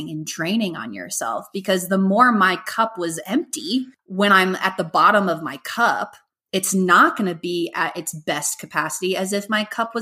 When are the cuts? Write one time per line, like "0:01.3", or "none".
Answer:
0:04.0